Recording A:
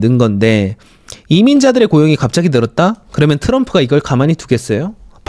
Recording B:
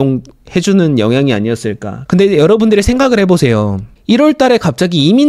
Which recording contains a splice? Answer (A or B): B